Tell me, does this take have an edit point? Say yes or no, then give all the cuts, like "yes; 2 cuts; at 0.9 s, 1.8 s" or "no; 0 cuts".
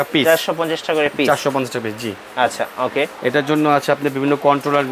no; 0 cuts